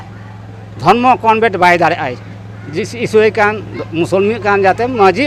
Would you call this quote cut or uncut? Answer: uncut